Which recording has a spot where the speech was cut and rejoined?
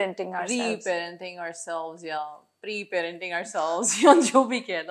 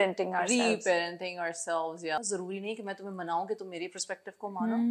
second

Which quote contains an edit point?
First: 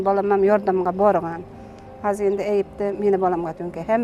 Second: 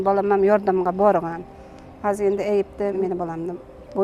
second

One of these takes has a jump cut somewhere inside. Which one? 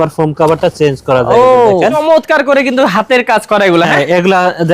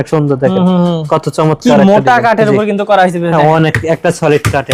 first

